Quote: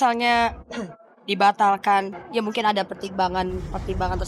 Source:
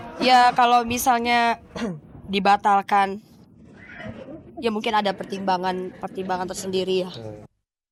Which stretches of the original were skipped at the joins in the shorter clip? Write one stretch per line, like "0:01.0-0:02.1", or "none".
0:03.2-0:04.5